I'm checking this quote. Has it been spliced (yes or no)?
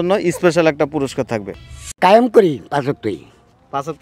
yes